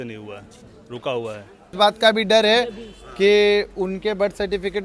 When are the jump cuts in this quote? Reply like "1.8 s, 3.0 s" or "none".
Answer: 1.7 s

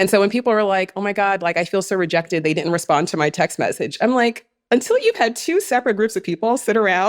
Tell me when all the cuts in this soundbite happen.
none

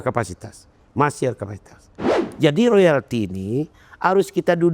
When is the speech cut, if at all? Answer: 2.1 s

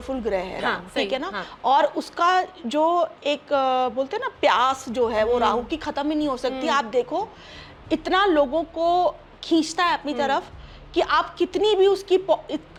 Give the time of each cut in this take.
none

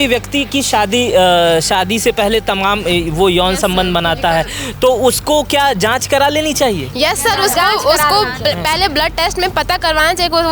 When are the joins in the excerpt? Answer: none

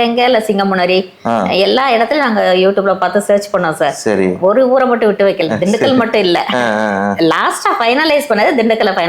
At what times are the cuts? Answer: none

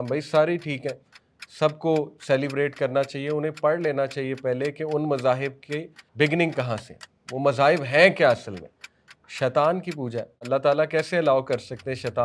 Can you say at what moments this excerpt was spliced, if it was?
6.0 s, 10.4 s

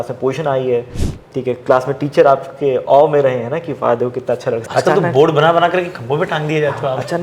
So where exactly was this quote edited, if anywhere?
4.6 s

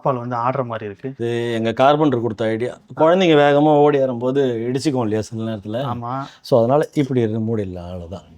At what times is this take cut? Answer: 1.2 s

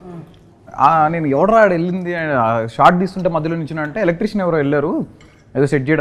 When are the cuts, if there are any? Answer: none

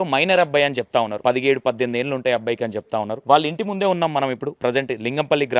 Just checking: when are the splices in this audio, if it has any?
1.1 s, 3.1 s, 4.5 s

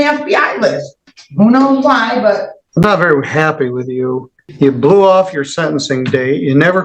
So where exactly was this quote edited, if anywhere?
2.6 s, 4.4 s

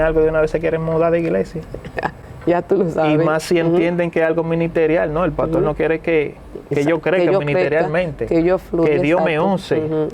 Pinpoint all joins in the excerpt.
none

